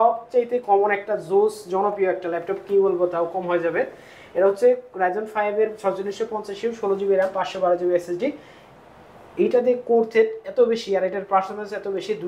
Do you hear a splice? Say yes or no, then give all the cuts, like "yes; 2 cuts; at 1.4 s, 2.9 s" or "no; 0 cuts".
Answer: no; 0 cuts